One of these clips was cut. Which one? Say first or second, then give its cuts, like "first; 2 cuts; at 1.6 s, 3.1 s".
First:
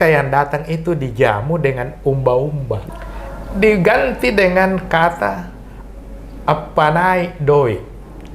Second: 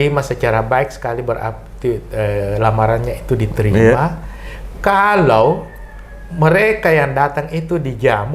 first; 1 cut; at 2.8 s